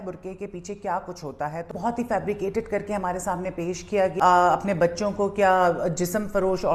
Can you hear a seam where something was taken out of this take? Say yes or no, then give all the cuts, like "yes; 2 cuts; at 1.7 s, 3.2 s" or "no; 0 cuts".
yes; 2 cuts; at 1.7 s, 4.1 s